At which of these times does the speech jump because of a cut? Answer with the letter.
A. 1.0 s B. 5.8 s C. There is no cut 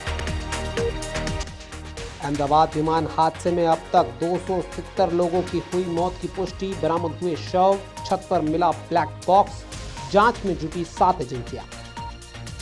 A